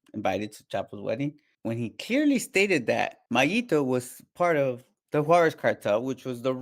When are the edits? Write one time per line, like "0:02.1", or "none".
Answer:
0:01.5
0:03.2
0:04.9